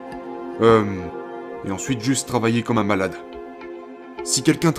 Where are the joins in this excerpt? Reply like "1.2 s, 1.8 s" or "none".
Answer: 3.8 s